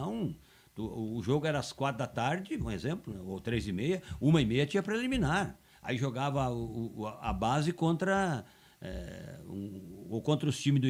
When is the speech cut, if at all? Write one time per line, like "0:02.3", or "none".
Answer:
none